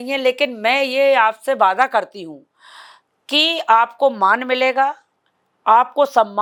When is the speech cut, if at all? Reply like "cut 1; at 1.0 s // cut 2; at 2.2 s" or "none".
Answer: none